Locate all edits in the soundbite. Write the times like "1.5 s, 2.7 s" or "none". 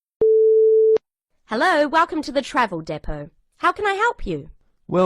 1.0 s